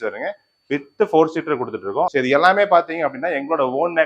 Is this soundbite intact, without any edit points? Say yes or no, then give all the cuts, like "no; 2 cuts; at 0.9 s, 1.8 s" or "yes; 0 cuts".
no; 1 cut; at 2.1 s